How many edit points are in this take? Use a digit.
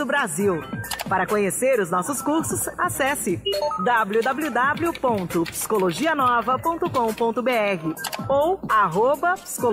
1